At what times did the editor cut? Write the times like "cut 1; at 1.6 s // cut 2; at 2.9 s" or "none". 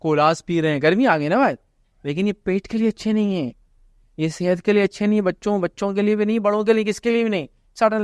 none